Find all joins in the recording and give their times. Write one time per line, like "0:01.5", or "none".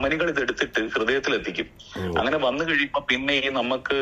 none